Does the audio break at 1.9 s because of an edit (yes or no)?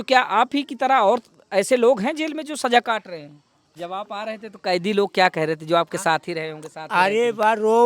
no